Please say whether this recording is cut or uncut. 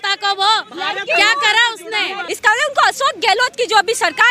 cut